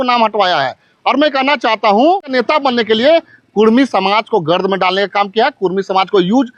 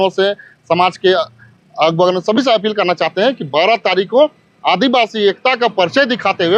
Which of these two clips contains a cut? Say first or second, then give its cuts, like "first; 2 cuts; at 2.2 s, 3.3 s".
first; 1 cut; at 2.3 s